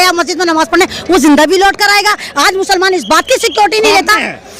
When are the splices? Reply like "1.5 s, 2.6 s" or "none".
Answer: none